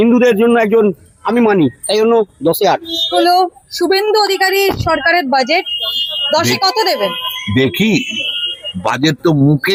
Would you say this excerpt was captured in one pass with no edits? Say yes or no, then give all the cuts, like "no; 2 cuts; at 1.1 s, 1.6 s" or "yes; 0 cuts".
yes; 0 cuts